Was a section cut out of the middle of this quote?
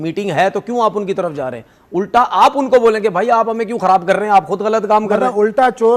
no; 0 cuts

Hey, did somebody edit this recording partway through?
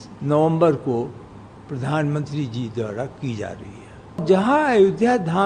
yes; 1 cut; at 4.2 s

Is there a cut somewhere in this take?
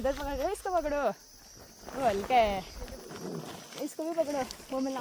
no; 0 cuts

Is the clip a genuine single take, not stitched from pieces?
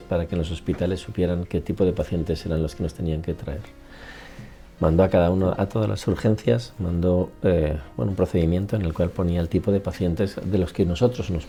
yes; 0 cuts

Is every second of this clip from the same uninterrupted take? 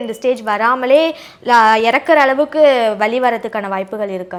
yes; 0 cuts

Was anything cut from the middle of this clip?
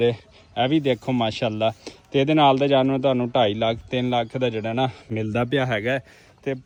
no; 0 cuts

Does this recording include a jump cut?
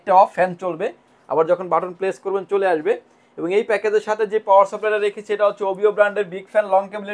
no; 0 cuts

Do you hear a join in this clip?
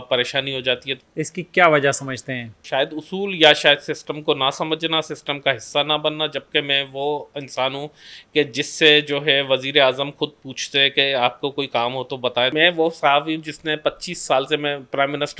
yes; 3 cuts; at 0.9 s, 2.6 s, 12.5 s

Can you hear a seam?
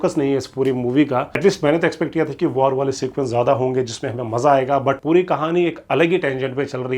yes; 2 cuts; at 1.3 s, 5.0 s

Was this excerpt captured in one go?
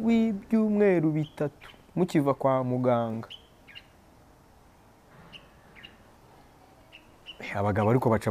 yes; 0 cuts

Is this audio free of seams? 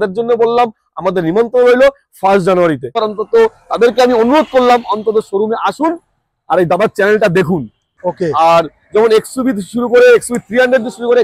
no; 2 cuts; at 2.9 s, 8.0 s

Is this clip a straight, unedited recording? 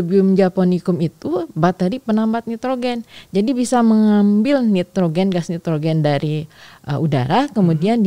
yes; 0 cuts

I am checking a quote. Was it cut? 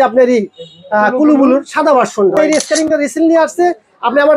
yes; 1 cut; at 2.4 s

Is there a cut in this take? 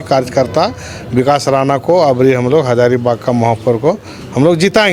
no; 0 cuts

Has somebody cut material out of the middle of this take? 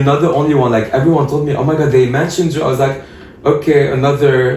no; 0 cuts

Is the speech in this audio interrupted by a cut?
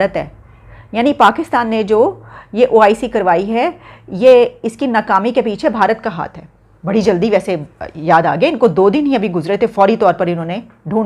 no; 0 cuts

